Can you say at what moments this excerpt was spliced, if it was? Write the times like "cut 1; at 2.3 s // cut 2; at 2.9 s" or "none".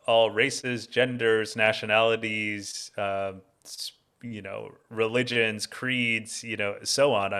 none